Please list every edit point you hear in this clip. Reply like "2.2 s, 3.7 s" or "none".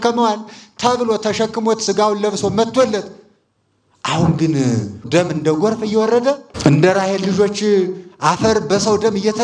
5.0 s, 6.5 s